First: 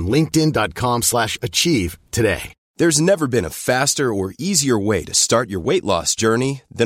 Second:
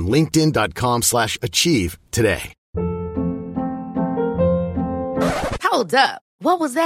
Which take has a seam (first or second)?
second